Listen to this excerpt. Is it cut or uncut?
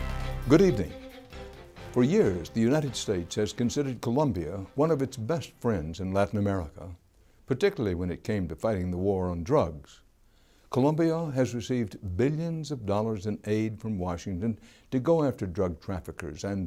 uncut